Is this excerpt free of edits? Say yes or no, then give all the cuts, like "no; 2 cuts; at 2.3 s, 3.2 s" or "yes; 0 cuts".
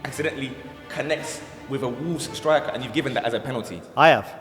yes; 0 cuts